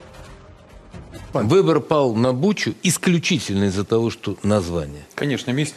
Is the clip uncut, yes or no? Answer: no